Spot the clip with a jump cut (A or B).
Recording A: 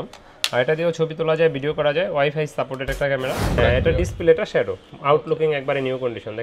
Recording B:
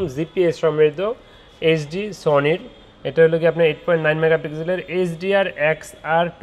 A